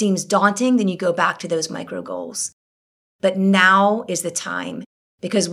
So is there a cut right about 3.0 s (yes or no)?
yes